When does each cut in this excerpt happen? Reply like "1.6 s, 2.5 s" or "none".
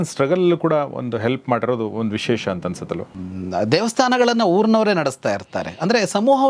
3.1 s